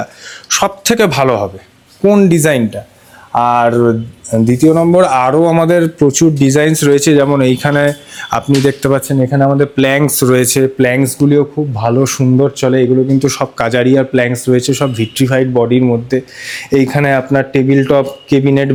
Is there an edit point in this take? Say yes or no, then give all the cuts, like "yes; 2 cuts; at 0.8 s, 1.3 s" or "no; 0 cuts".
no; 0 cuts